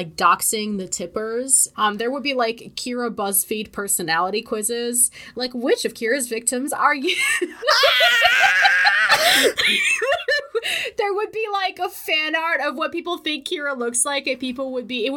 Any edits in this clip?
yes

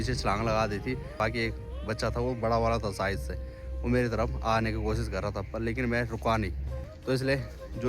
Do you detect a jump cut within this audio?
yes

